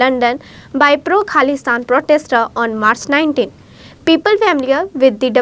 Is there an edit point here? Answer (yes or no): no